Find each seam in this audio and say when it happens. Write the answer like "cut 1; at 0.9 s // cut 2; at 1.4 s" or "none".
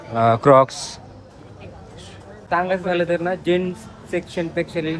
cut 1; at 2.3 s